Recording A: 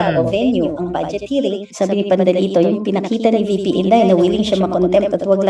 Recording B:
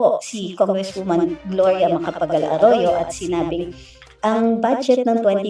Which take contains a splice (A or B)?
A